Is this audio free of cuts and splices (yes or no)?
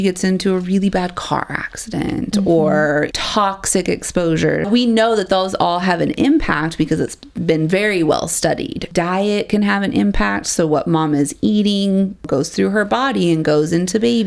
no